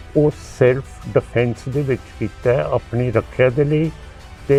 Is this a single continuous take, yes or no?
yes